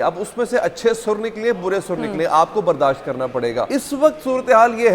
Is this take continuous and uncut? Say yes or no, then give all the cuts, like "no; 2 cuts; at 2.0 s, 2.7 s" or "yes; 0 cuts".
no; 1 cut; at 3.7 s